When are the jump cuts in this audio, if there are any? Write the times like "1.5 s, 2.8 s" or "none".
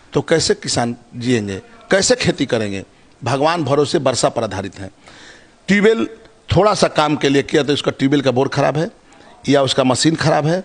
none